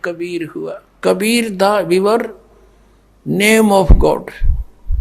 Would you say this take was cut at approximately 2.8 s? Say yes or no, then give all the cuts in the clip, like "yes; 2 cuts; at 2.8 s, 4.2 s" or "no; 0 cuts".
no; 1 cut; at 0.9 s